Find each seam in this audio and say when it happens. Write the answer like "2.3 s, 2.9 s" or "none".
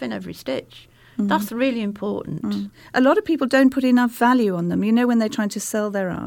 2.8 s